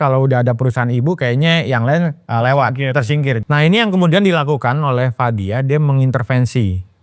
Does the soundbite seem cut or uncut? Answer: cut